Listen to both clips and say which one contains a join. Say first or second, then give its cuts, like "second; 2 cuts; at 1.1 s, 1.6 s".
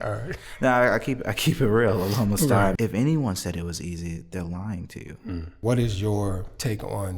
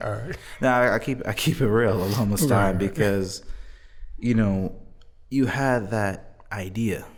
first; 2 cuts; at 2.8 s, 5.5 s